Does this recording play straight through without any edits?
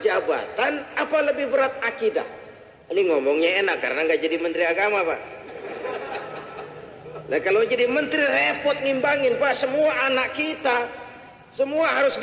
yes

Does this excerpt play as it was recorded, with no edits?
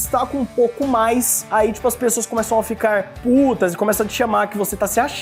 yes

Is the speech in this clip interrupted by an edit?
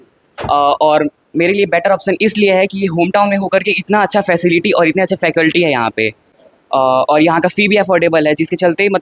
no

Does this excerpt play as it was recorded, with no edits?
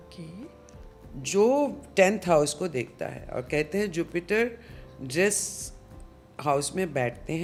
yes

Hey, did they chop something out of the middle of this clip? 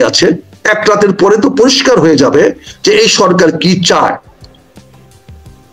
no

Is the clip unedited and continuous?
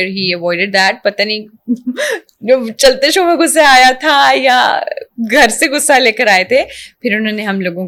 yes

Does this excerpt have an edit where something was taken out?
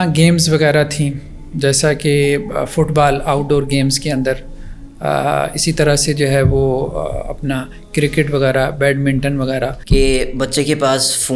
yes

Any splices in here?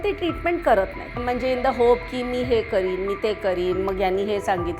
yes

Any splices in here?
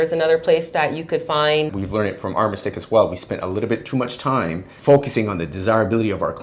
yes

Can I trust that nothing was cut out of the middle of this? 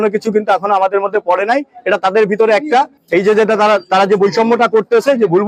yes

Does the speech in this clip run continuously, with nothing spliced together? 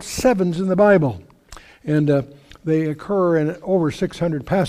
no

